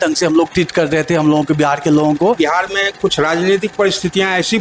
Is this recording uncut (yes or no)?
no